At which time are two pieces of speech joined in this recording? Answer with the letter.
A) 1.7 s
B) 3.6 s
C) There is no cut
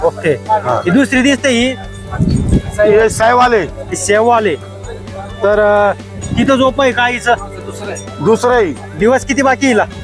C